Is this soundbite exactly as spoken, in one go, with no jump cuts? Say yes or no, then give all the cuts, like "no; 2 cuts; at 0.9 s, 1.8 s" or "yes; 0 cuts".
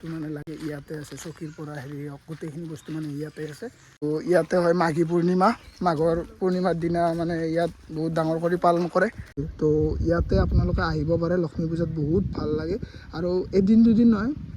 no; 2 cuts; at 4.0 s, 9.5 s